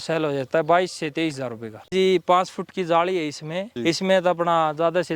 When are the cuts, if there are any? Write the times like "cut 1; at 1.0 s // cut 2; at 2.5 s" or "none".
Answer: cut 1; at 1.9 s